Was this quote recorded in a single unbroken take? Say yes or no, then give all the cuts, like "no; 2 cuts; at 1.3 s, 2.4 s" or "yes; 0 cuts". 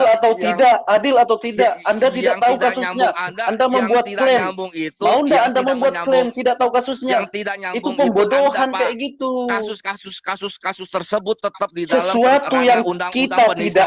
yes; 0 cuts